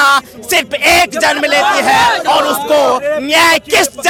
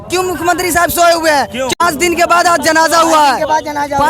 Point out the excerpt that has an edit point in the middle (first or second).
second